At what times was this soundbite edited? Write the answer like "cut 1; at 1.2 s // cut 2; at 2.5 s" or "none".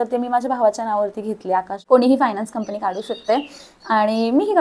cut 1; at 1.8 s